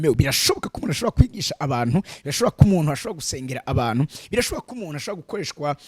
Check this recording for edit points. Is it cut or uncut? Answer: uncut